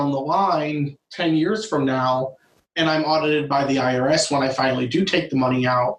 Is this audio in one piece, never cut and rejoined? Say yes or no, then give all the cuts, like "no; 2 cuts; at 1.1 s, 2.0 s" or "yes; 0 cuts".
yes; 0 cuts